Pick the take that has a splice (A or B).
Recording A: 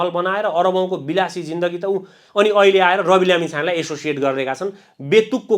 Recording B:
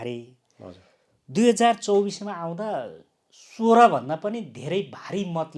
A